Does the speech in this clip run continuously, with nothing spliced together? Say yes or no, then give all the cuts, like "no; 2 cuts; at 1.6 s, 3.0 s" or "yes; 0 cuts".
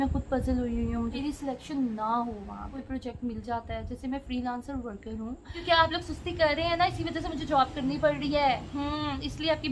no; 3 cuts; at 1.2 s, 2.8 s, 5.6 s